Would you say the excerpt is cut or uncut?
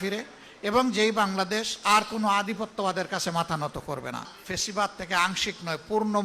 cut